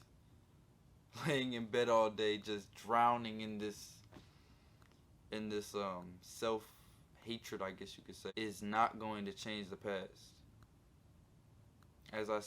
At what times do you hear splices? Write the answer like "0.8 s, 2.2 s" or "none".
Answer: 8.3 s